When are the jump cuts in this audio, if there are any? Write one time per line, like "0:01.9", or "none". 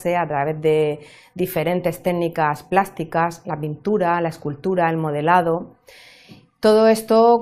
0:05.3